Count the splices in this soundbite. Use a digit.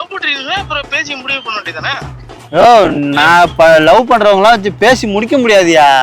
0